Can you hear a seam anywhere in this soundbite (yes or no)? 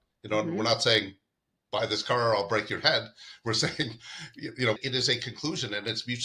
yes